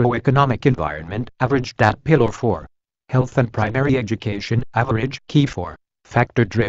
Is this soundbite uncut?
yes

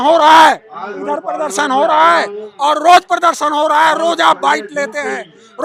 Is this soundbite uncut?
yes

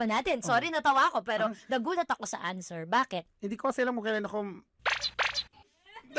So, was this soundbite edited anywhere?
no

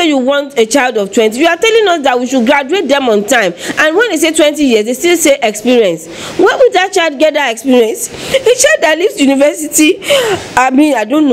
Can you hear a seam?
no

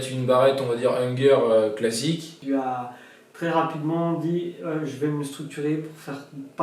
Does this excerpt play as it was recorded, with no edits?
no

